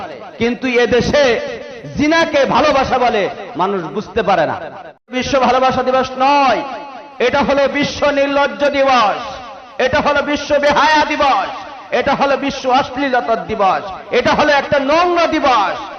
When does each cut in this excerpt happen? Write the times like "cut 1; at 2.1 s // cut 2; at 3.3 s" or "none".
cut 1; at 5.1 s